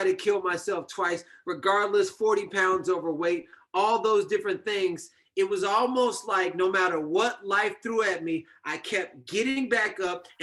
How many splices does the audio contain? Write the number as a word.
zero